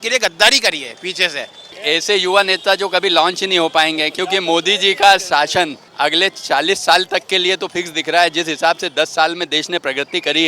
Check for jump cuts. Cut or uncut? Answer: cut